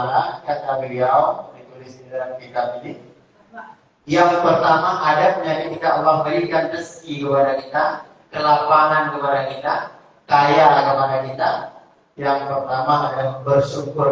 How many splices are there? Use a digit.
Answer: 0